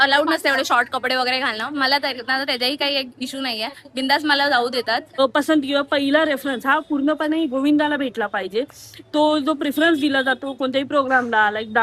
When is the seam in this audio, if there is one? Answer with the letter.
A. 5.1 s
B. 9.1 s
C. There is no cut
A